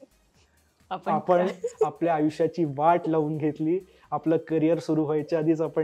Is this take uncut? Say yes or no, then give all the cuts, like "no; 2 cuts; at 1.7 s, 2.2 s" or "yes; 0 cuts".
yes; 0 cuts